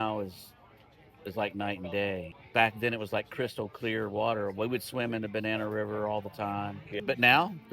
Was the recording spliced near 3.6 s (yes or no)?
no